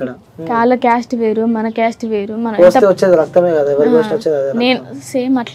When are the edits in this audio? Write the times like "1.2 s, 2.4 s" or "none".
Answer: none